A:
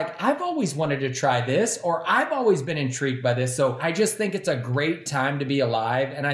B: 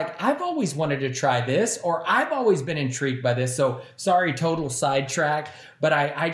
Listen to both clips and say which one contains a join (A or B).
A